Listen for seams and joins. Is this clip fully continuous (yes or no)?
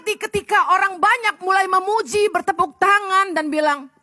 yes